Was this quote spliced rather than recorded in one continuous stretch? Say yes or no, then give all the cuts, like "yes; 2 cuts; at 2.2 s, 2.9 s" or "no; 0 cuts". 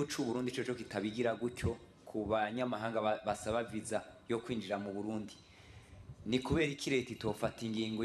no; 0 cuts